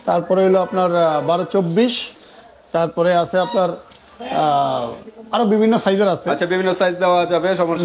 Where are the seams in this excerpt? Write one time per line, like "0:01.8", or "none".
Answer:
none